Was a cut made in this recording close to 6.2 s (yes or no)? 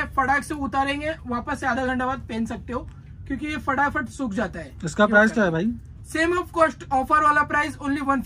no